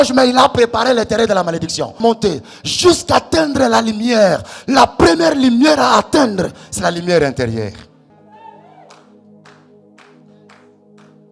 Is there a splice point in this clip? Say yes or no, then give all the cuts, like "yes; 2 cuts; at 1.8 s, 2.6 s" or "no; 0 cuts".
yes; 2 cuts; at 2.0 s, 7.9 s